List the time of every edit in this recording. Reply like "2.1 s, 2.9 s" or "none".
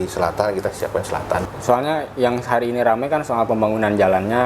1.4 s